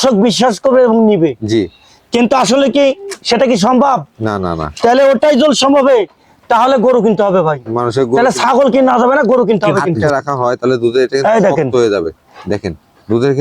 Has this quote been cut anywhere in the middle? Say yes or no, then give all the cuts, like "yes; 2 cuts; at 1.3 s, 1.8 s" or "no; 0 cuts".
yes; 1 cut; at 10.0 s